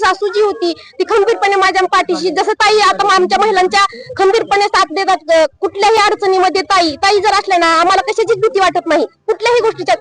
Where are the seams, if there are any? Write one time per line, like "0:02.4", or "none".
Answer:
none